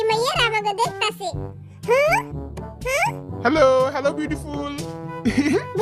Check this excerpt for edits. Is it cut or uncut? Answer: uncut